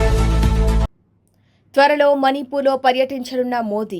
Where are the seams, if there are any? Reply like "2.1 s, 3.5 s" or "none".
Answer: 0.9 s